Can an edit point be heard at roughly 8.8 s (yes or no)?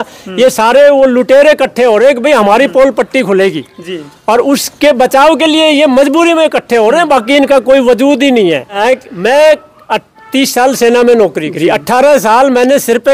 yes